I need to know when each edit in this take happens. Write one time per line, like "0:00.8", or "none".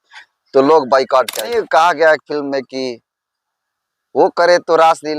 0:01.4